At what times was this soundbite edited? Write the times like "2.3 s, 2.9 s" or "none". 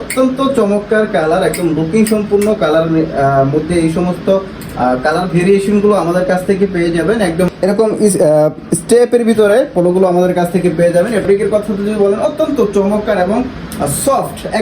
7.5 s, 11.2 s